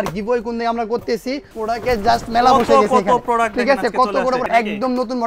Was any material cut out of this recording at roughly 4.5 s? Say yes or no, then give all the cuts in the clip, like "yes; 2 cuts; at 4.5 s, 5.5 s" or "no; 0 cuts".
yes; 2 cuts; at 1.5 s, 4.5 s